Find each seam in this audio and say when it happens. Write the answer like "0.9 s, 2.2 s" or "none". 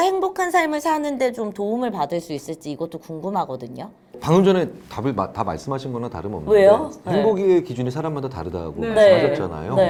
none